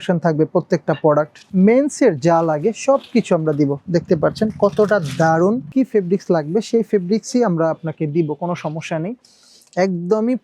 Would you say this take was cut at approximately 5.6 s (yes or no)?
yes